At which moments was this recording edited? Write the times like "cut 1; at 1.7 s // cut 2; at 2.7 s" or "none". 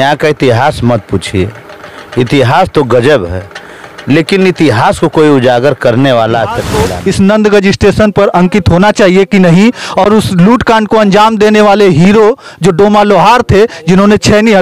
cut 1; at 6.7 s